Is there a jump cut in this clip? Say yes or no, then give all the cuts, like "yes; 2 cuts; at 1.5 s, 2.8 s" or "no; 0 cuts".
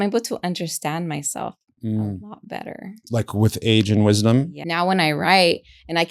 yes; 1 cut; at 4.6 s